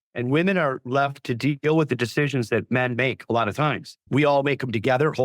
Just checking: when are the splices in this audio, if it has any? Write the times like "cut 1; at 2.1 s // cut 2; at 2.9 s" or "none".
cut 1; at 3.9 s